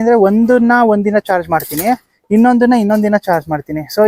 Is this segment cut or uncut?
uncut